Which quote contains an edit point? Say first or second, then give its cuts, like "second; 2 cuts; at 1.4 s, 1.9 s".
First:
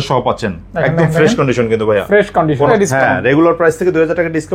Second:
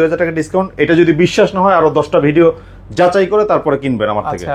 first; 1 cut; at 2.7 s